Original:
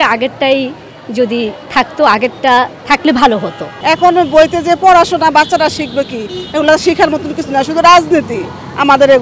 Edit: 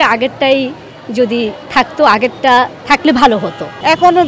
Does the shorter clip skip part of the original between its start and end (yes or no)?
no